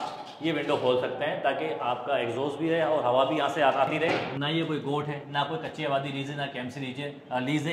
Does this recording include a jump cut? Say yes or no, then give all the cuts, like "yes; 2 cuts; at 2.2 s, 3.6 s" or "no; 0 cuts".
yes; 1 cut; at 4.3 s